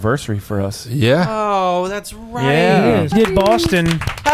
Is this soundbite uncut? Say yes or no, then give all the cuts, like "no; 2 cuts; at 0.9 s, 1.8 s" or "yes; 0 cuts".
no; 1 cut; at 3.1 s